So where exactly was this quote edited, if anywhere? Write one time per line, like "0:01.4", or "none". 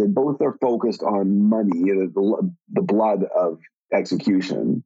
0:03.7